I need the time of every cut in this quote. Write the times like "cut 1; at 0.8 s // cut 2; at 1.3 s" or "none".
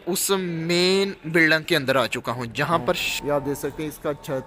cut 1; at 3.1 s